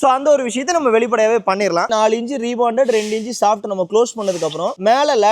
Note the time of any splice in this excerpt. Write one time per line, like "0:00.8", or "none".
0:01.9